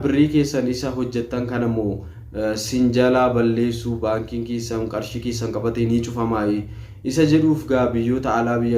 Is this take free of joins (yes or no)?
yes